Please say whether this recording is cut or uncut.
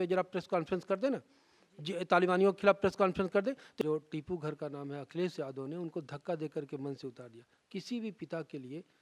cut